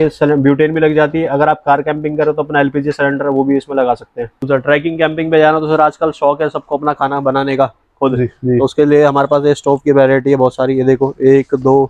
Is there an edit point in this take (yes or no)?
yes